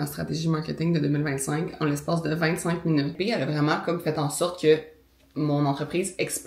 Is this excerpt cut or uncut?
cut